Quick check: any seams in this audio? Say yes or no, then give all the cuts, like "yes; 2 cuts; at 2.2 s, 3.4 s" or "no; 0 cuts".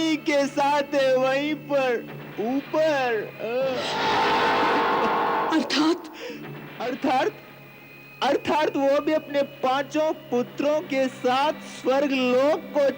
no; 0 cuts